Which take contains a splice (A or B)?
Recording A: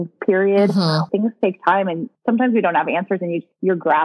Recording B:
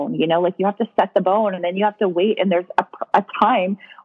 A